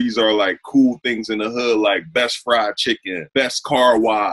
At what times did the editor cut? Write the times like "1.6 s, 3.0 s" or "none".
3.1 s